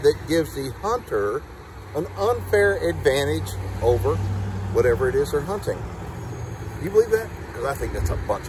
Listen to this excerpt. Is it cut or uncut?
uncut